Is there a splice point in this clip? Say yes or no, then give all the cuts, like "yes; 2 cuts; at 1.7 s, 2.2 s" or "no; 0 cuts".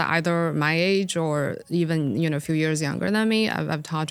no; 0 cuts